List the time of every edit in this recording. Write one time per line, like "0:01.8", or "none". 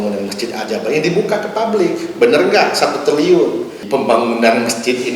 0:03.8